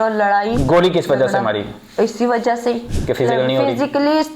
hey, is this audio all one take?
no; 1 cut; at 2.9 s

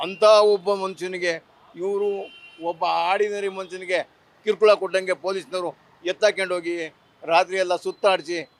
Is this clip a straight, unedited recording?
yes; 0 cuts

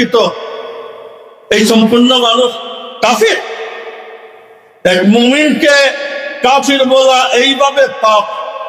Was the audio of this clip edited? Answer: no; 0 cuts

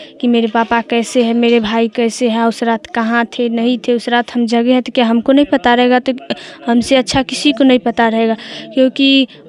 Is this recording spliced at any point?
no; 0 cuts

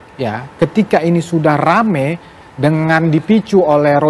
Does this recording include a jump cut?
no; 0 cuts

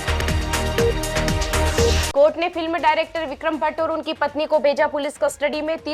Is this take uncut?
no; 1 cut; at 1.9 s

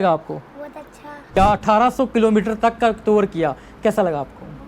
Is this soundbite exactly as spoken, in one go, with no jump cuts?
no; 1 cut; at 1.3 s

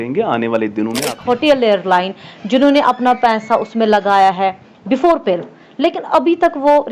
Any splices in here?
yes; 1 cut; at 1.1 s

